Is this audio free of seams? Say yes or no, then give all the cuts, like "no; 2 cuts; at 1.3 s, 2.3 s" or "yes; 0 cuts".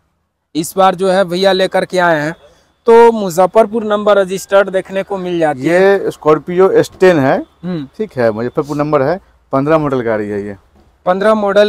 yes; 0 cuts